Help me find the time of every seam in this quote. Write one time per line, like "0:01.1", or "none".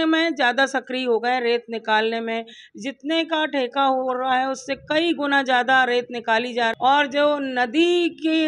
0:06.7